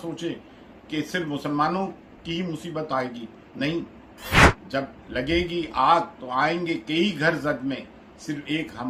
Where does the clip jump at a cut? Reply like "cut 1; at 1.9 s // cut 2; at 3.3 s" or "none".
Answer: none